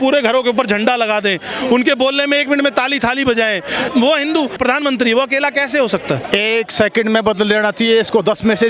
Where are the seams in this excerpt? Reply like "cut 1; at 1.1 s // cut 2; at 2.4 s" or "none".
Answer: cut 1; at 3.9 s // cut 2; at 4.6 s // cut 3; at 6.2 s